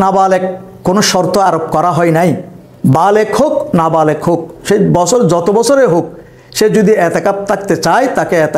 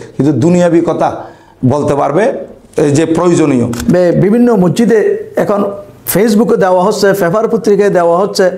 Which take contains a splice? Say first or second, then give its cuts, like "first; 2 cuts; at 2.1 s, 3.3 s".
second; 1 cut; at 3.7 s